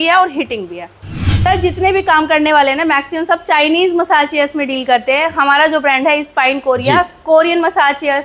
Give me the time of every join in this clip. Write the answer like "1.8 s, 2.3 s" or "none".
1.3 s